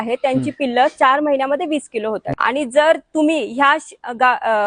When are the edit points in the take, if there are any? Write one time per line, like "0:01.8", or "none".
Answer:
0:02.3